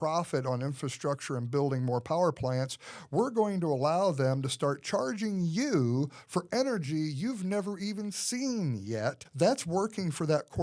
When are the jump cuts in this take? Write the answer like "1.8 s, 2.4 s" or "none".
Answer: 9.2 s